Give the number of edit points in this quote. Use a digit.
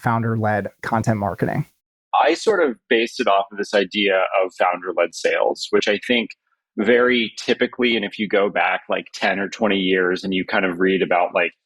1